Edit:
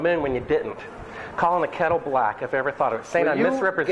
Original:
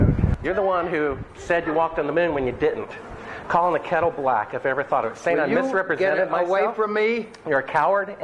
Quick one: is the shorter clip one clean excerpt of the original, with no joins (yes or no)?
yes